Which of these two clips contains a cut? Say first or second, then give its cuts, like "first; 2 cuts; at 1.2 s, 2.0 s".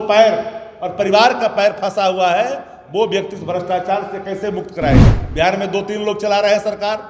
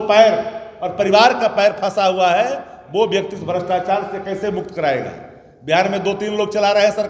first; 1 cut; at 5.2 s